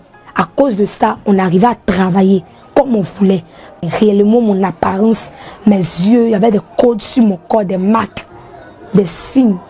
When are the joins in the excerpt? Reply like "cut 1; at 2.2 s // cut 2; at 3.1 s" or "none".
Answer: cut 1; at 3.8 s